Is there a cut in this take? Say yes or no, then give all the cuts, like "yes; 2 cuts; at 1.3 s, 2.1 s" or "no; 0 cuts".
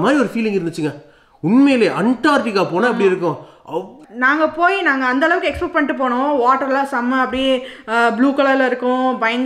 yes; 1 cut; at 4.0 s